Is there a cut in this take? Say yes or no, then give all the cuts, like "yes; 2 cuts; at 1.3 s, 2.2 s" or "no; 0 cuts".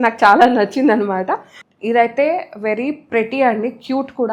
yes; 1 cut; at 1.5 s